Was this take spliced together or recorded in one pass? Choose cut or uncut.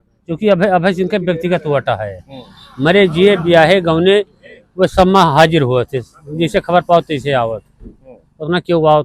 uncut